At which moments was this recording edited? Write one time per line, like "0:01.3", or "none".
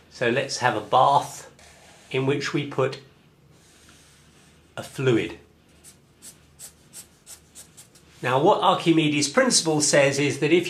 none